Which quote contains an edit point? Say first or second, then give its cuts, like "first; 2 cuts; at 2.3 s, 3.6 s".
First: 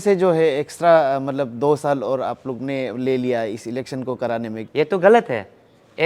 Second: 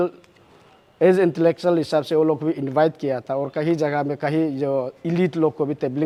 first; 1 cut; at 4.6 s